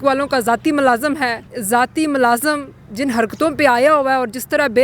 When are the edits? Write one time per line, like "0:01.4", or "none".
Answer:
0:01.5